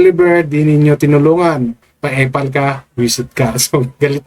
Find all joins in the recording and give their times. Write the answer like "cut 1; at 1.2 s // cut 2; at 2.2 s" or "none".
none